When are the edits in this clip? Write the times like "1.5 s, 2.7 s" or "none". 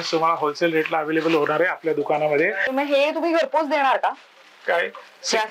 2.7 s